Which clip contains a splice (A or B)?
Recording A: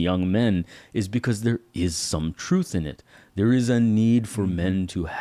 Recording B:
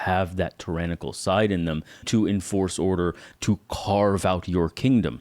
B